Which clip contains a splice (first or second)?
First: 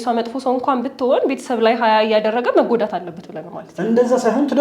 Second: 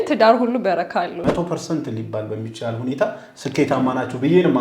second